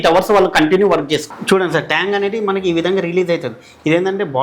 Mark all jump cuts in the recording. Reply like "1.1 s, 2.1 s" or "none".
1.3 s